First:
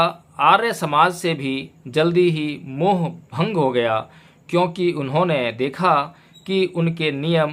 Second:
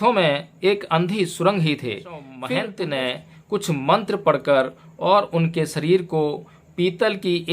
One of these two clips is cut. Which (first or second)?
second